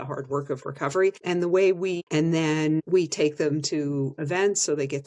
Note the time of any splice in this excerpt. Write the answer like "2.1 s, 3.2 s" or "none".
1.2 s, 2.0 s, 2.8 s